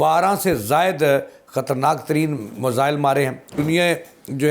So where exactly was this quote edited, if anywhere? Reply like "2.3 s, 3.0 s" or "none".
3.6 s

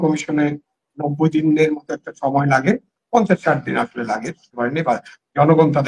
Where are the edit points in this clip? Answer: 4.4 s

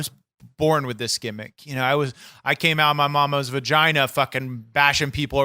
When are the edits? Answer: none

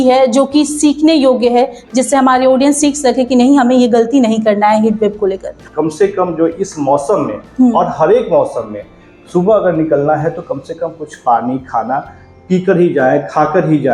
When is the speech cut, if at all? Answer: 5.6 s

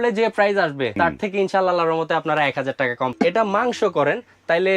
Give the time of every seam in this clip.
0.9 s, 3.1 s

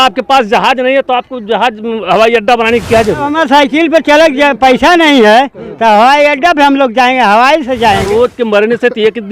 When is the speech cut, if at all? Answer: 3.3 s, 8.1 s

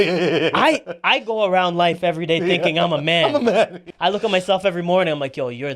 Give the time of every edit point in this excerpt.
3.8 s

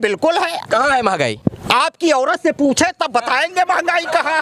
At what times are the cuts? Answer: none

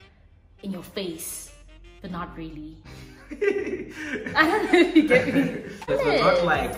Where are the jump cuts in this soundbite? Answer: 5.8 s

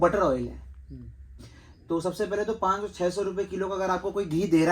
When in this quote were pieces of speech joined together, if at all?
1.2 s

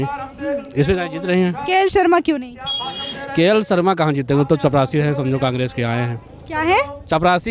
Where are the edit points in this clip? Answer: none

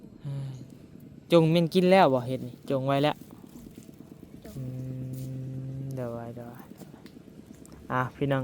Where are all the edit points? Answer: none

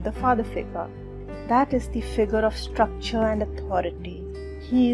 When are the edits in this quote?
none

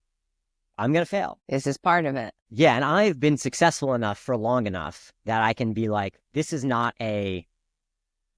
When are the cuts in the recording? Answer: 1.4 s, 2.4 s

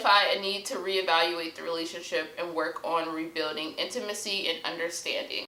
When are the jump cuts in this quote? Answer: none

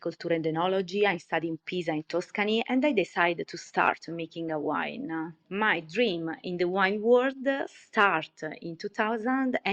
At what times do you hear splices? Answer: 5.4 s

